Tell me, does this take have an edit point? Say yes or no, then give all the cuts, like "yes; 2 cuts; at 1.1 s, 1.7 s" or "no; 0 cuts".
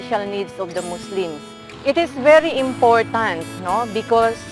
yes; 1 cut; at 1.7 s